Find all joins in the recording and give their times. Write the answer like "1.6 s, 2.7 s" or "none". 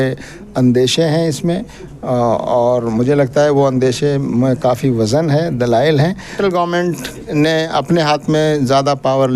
6.3 s